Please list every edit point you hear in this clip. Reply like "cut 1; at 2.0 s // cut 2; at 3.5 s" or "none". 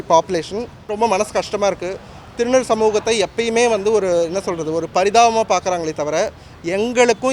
cut 1; at 0.9 s